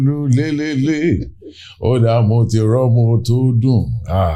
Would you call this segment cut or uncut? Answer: uncut